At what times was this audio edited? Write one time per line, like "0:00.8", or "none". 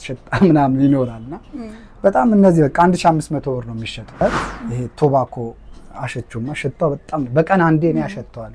0:04.2